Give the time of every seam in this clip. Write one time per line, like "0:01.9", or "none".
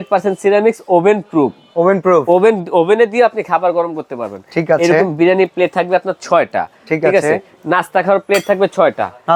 none